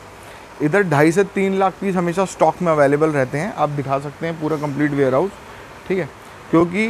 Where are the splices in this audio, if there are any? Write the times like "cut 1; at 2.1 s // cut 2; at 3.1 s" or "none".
none